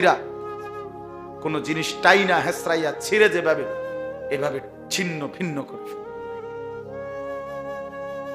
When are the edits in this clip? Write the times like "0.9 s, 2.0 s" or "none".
5.7 s, 7.4 s

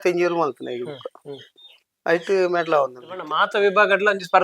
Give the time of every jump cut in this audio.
3.3 s

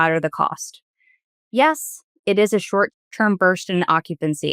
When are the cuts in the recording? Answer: 3.0 s

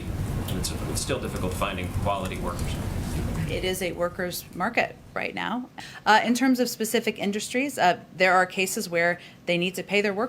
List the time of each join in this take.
5.8 s

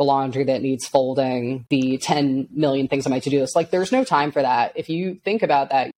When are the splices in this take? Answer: none

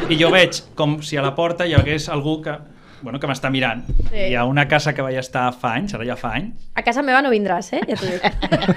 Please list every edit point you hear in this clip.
4.2 s

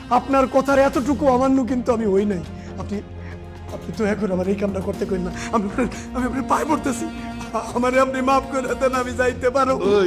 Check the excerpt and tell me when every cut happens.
none

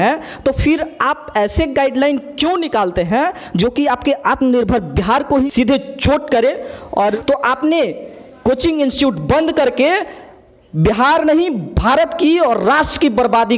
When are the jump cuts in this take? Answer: 5.5 s, 7.1 s

